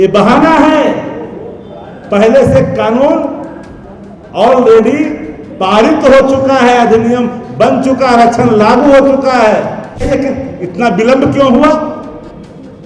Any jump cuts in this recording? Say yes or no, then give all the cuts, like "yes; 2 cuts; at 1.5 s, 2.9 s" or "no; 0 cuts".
yes; 1 cut; at 9.9 s